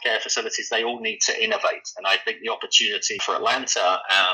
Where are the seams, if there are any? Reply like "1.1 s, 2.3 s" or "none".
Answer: 3.2 s